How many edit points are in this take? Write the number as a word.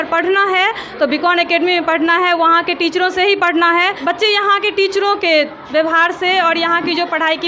one